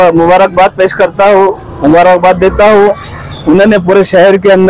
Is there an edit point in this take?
no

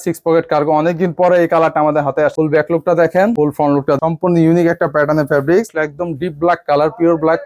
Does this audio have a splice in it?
yes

